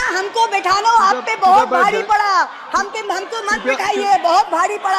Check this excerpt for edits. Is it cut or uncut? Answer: uncut